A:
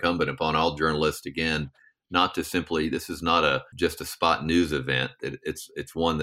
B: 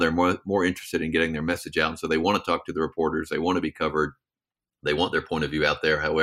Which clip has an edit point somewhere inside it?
A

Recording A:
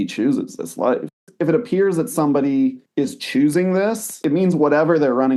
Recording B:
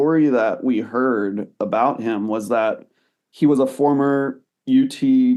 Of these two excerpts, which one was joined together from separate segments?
A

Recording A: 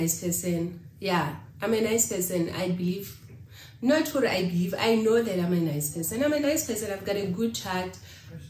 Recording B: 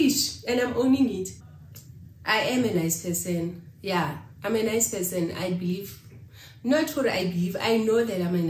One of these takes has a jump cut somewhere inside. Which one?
B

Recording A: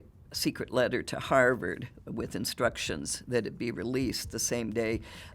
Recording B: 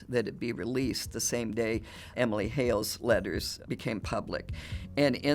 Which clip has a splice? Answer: B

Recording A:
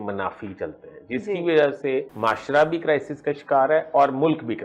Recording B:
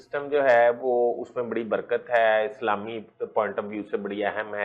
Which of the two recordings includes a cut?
A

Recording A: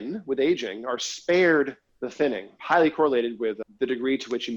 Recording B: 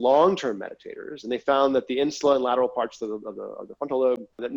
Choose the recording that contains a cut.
A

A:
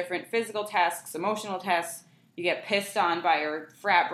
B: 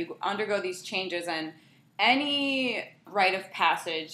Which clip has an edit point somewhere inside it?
B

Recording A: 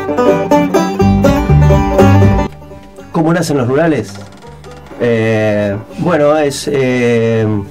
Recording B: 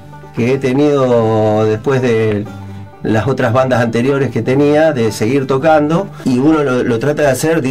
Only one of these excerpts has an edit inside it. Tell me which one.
B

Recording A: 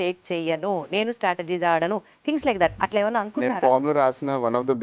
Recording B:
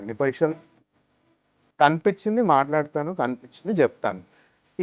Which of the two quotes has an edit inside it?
B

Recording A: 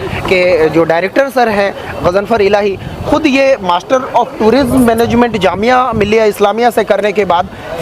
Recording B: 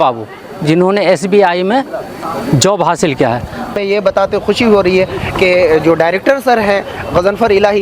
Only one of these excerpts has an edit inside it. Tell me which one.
B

